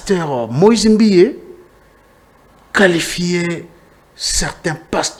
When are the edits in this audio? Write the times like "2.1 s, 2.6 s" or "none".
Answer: none

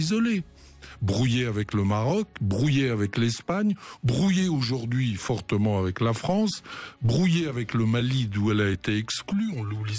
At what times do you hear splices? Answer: none

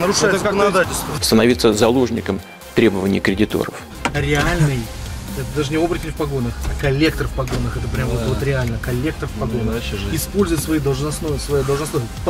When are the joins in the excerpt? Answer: 1.0 s, 3.9 s

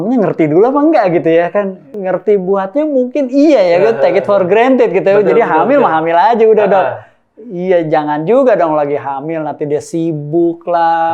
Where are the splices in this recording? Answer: 1.9 s

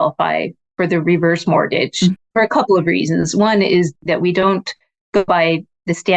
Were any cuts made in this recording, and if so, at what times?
2.2 s, 3.9 s, 5.3 s

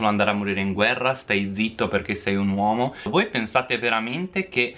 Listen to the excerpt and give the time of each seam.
3.1 s

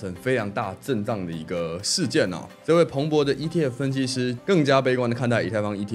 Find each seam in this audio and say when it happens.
2.5 s, 4.4 s

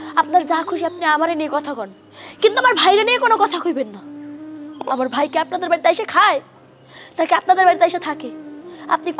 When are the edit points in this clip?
none

